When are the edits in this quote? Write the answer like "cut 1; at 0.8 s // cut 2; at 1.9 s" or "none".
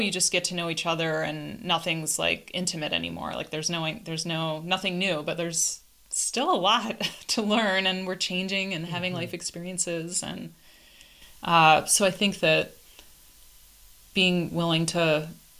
none